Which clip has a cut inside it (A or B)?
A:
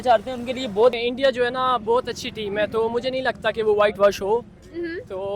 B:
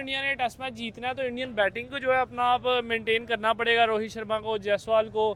A